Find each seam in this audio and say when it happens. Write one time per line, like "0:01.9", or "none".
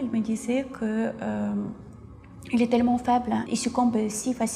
0:03.4